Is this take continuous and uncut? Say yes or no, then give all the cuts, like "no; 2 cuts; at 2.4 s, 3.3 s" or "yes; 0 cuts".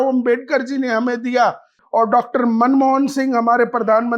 no; 1 cut; at 1.8 s